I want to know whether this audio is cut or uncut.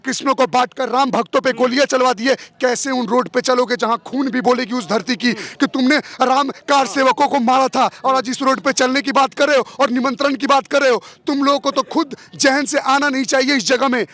uncut